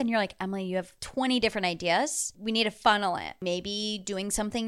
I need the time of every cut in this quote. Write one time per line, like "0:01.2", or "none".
0:01.0
0:02.3
0:03.4